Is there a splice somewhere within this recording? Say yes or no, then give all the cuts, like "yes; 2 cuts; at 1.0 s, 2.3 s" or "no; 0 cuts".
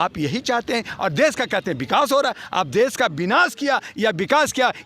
no; 0 cuts